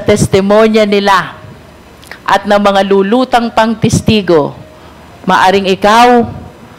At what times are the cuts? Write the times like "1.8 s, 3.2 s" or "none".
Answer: none